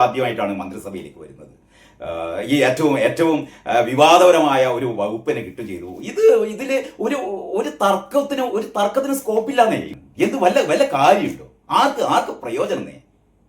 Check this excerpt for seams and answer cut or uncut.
cut